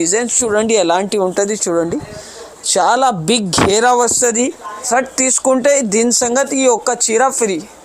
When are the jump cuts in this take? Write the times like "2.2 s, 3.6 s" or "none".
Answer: 4.8 s